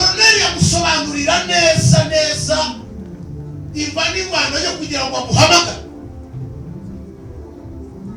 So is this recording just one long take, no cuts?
yes; 0 cuts

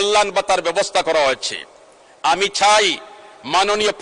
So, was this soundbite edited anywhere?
no; 0 cuts

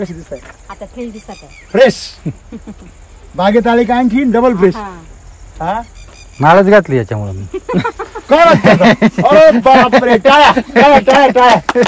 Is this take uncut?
yes; 0 cuts

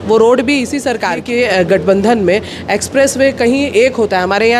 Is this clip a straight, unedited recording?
no; 1 cut; at 1.3 s

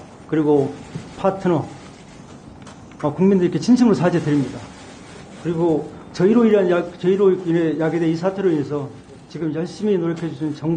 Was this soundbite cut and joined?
no; 0 cuts

